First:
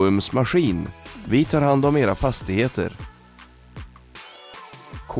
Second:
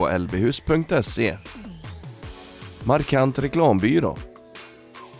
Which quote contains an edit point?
second; 1 cut; at 4.1 s

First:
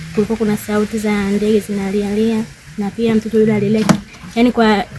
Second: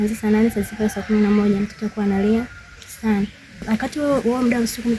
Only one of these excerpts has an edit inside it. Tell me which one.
second; 1 cut; at 3.6 s

